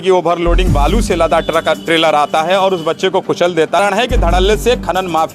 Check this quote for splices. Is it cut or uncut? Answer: cut